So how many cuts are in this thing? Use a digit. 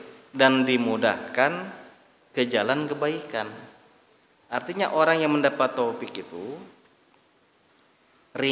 0